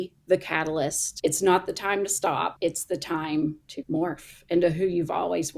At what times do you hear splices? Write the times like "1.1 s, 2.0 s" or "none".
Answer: 1.0 s, 2.5 s, 3.7 s